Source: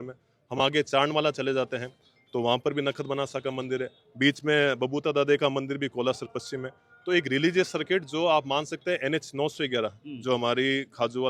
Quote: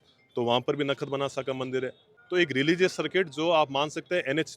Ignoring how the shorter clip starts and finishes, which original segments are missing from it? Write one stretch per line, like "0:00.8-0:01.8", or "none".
0:04.0-0:06.8